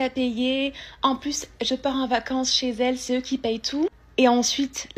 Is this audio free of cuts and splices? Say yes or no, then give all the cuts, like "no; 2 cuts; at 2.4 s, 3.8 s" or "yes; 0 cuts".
yes; 0 cuts